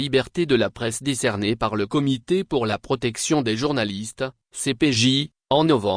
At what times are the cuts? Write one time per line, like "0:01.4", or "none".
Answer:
0:01.2